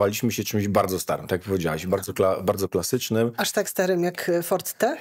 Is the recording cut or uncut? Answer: uncut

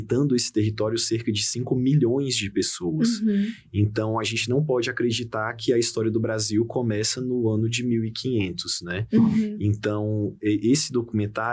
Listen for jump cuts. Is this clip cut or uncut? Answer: uncut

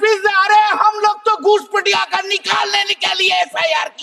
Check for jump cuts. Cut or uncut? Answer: uncut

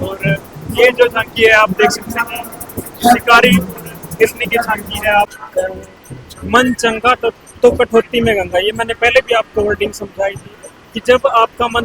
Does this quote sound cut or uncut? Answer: cut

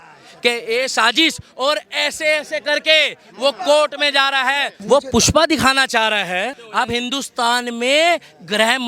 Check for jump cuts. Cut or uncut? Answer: cut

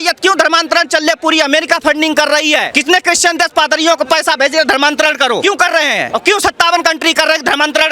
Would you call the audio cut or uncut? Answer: cut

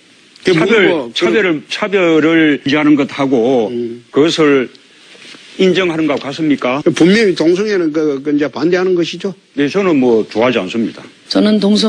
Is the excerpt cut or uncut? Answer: uncut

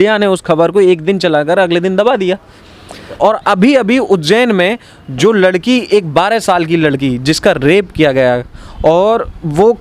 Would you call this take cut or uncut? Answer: cut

